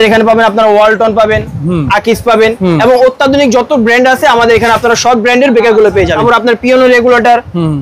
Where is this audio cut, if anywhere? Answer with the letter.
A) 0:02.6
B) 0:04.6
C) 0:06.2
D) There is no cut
C